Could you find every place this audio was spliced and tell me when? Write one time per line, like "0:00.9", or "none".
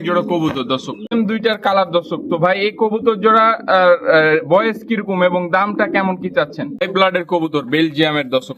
0:01.1
0:06.8